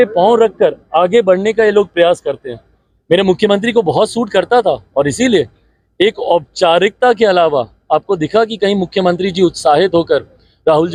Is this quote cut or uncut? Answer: uncut